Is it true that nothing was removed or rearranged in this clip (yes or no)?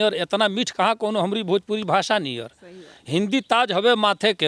yes